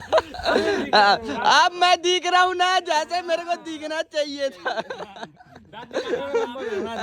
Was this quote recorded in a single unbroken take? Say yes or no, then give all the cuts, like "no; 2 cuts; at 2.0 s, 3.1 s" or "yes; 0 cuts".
yes; 0 cuts